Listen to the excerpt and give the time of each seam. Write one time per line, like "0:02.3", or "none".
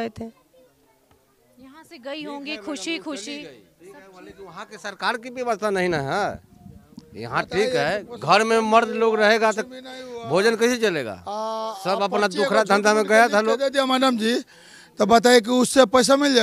none

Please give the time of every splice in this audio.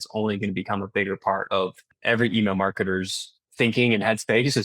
0:01.9
0:03.4

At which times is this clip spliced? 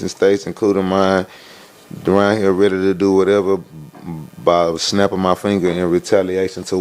none

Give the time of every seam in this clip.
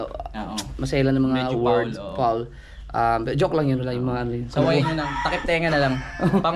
none

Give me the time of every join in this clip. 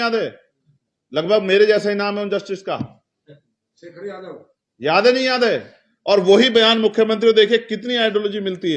none

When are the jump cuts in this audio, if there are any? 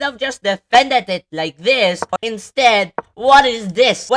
0:02.1

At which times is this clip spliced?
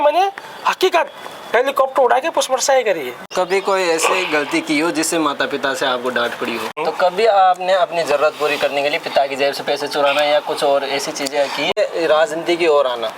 0:03.2
0:06.8
0:11.7

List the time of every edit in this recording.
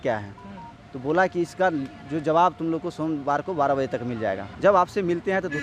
0:04.5

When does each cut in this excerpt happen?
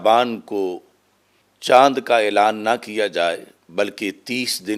none

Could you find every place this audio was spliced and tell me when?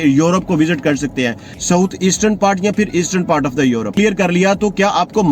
0:01.5
0:03.9

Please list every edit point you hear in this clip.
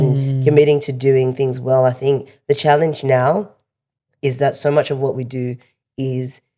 none

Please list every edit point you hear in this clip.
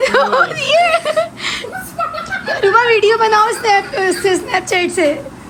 none

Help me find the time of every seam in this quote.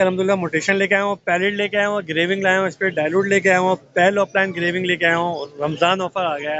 none

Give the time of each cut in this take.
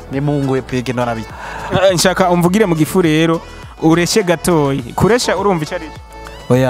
0:01.2

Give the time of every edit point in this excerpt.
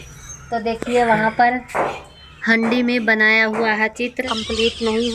0:04.2

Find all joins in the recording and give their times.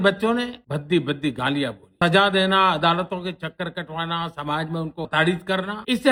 none

